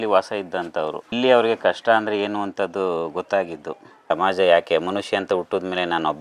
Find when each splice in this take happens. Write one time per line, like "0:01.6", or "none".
0:01.0
0:04.1